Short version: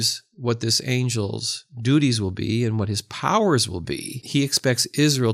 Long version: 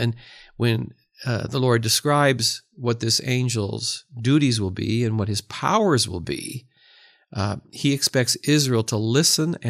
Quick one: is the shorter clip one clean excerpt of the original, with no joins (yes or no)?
no